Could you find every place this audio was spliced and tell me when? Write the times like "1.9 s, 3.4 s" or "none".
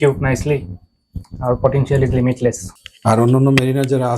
2.7 s